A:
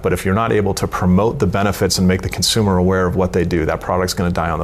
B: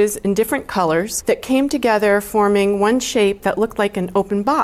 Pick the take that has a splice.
B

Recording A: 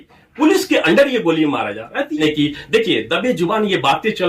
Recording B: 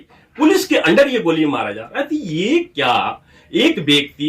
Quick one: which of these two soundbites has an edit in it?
A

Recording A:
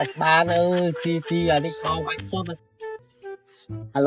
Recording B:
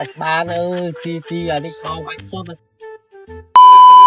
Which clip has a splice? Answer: A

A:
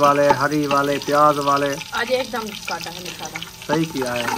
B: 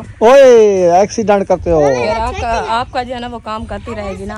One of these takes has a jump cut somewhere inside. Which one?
A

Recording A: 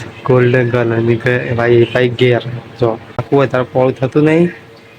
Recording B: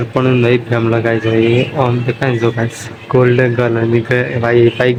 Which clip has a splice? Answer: A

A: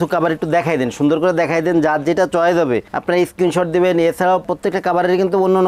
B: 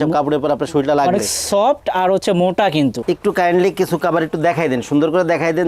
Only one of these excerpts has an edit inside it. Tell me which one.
B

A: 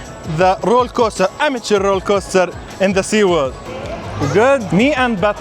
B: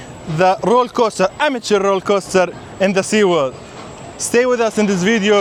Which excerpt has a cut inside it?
A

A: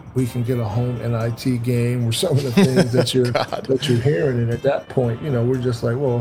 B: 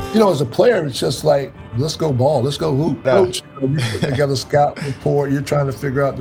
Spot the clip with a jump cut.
B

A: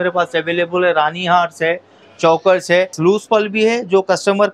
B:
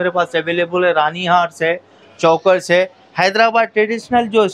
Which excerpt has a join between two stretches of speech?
A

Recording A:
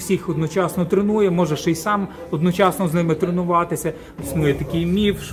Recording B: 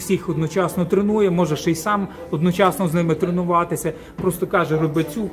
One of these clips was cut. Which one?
A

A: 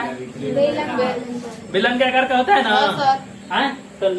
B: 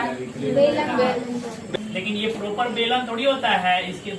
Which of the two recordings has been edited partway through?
B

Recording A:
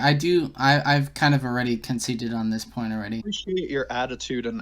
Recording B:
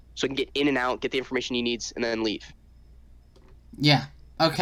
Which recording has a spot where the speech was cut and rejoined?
A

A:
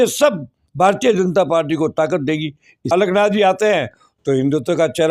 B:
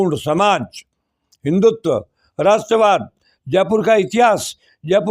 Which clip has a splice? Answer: A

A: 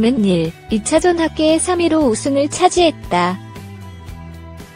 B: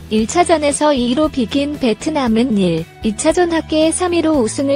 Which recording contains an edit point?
A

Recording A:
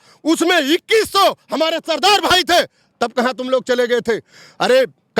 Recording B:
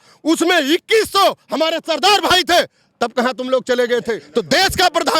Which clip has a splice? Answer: B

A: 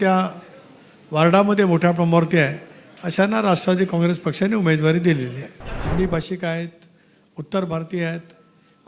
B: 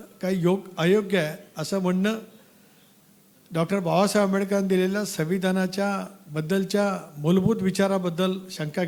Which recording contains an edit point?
A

